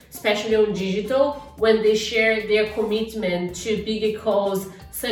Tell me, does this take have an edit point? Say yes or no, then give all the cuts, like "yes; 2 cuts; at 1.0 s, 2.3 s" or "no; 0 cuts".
no; 0 cuts